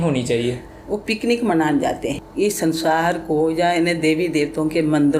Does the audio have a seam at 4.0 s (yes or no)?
no